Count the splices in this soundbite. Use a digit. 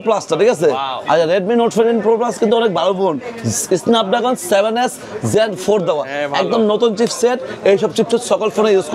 0